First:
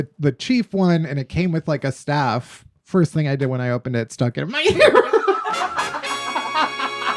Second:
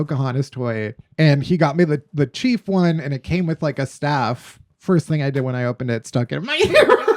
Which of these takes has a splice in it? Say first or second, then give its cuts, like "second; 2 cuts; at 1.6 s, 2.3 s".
second; 1 cut; at 1.0 s